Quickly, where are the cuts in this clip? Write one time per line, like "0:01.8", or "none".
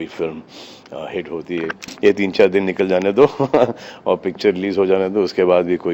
0:01.8